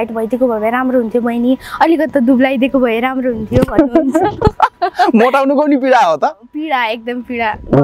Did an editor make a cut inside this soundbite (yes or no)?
no